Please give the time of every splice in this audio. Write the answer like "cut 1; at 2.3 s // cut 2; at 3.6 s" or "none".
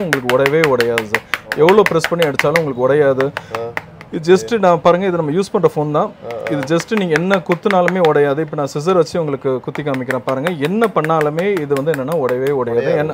none

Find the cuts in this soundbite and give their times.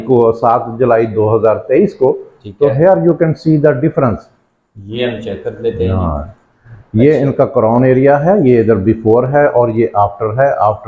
none

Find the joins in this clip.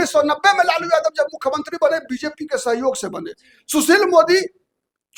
none

